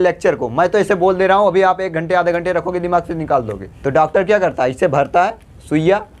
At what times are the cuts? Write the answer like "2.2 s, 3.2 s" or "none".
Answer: 3.6 s